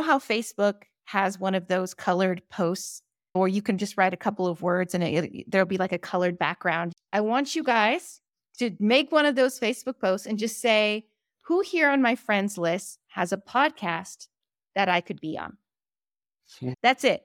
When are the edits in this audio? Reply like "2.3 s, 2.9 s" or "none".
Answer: 6.9 s